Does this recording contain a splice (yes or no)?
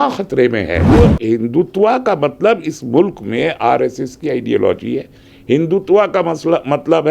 yes